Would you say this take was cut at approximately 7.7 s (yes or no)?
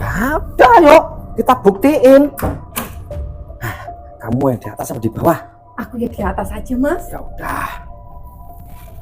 yes